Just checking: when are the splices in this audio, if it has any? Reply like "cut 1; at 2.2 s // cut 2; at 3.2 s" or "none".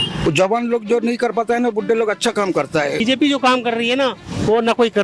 cut 1; at 3.0 s